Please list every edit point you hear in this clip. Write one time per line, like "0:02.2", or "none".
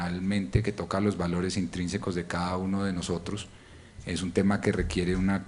0:03.3